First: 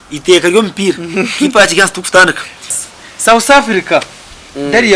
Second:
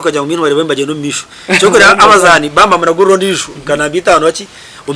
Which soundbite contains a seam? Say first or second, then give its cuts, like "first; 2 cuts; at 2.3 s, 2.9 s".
first; 1 cut; at 2.7 s